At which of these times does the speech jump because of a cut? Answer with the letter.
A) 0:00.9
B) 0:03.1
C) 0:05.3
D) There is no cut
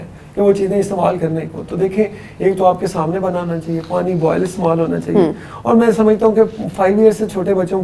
D